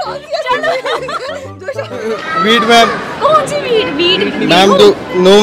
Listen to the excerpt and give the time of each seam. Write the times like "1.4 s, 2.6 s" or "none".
2.2 s